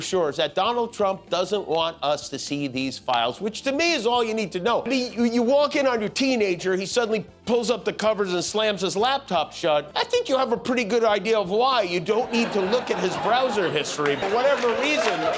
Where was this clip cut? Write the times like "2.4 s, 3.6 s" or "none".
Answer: 4.9 s, 9.9 s, 14.2 s